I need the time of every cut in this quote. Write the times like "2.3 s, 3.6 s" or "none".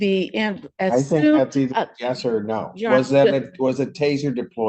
none